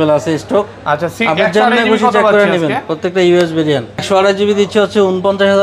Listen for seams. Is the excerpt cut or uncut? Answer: cut